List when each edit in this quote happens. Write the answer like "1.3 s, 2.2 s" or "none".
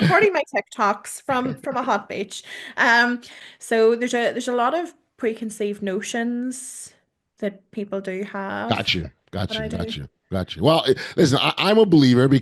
3.4 s